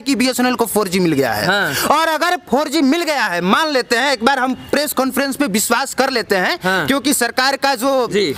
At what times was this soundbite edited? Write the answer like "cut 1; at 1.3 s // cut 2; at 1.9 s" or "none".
none